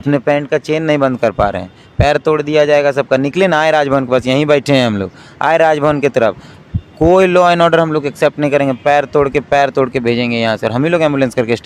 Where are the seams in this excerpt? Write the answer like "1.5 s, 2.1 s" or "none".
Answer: none